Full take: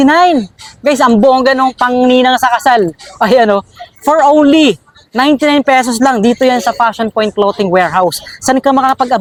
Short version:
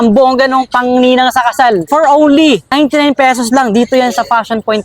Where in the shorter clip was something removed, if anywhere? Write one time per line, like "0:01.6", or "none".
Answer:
0:01.8
0:02.7